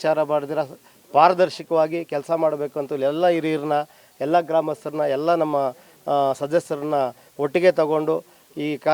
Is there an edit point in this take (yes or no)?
no